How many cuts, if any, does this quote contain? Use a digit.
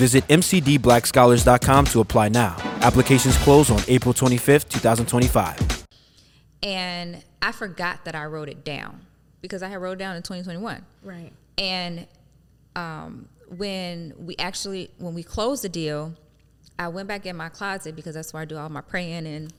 0